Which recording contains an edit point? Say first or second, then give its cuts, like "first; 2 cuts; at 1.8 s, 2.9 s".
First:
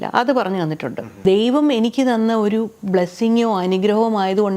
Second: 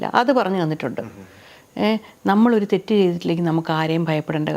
first; 1 cut; at 1.1 s